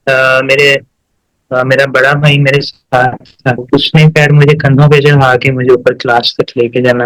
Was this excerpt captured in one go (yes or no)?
yes